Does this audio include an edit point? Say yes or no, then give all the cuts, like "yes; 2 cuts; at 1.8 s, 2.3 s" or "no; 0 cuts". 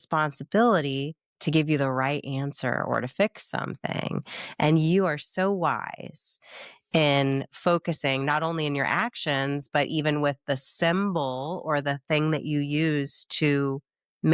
no; 0 cuts